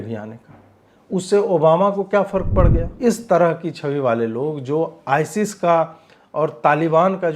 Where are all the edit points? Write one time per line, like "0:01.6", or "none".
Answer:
0:02.8